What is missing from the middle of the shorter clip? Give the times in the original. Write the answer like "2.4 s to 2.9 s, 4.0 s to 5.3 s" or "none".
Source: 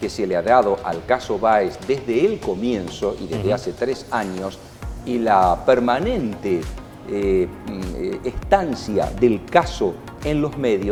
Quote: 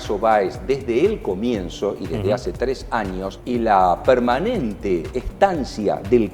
4.6 s to 5.0 s, 6.8 s to 8.3 s